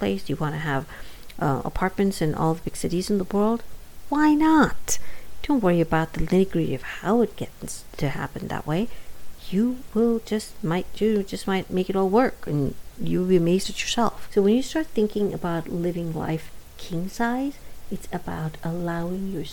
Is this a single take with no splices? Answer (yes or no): no